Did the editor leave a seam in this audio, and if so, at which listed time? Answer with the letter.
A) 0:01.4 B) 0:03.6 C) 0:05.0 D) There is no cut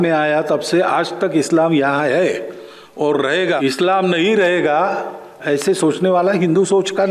B